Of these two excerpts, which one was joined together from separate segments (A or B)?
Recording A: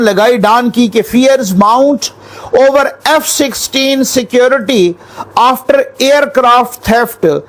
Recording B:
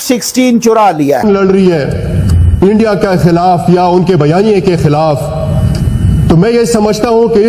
B